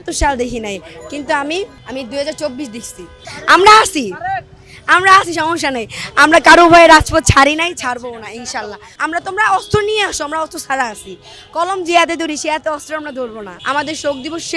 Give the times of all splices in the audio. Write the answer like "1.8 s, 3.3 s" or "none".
1.8 s, 8.8 s, 13.5 s